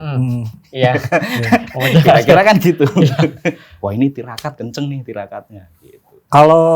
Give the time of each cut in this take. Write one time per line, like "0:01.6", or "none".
none